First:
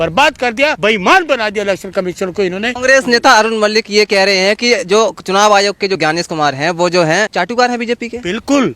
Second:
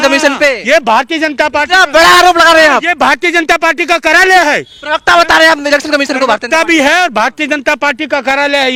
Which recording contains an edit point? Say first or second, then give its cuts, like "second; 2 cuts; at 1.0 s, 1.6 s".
first; 4 cuts; at 0.8 s, 2.8 s, 6.0 s, 7.3 s